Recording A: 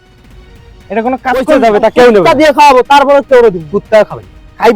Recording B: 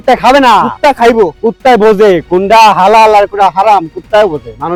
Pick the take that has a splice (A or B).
A